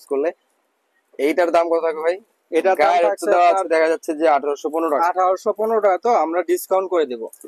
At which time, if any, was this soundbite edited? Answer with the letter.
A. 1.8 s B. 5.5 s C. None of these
C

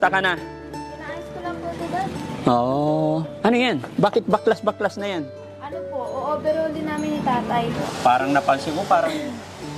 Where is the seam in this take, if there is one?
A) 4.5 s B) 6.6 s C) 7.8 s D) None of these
C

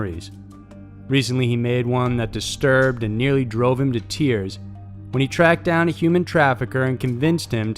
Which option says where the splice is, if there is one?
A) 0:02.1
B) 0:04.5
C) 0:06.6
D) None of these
C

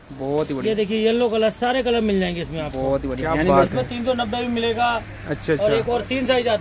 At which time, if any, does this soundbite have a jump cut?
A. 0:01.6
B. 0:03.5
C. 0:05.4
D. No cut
B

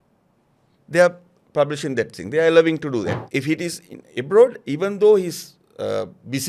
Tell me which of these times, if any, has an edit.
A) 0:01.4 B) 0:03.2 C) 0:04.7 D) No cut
B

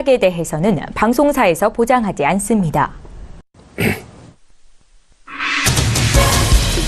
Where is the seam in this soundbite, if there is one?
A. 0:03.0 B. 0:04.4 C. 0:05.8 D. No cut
A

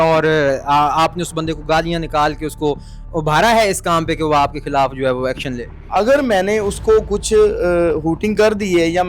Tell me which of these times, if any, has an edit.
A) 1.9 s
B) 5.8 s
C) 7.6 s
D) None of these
B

